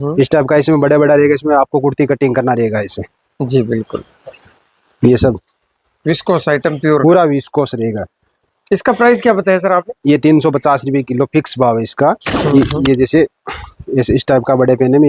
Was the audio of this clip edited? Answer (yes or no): no